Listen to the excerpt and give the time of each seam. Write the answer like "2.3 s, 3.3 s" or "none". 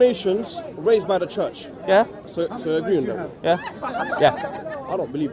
2.2 s